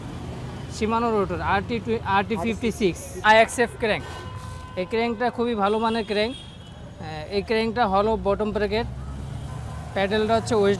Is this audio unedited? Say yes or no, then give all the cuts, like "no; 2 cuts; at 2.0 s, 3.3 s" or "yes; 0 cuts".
no; 1 cut; at 3.2 s